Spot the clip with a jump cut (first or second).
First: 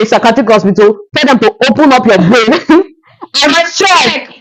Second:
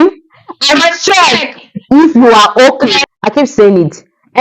second